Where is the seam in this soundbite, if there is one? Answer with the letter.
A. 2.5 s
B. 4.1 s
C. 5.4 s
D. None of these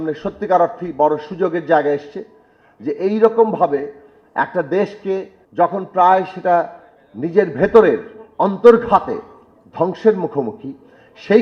C